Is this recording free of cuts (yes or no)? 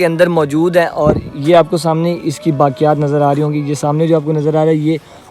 yes